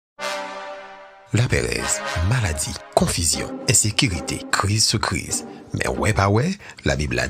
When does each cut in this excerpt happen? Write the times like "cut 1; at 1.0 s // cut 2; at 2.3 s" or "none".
cut 1; at 0.9 s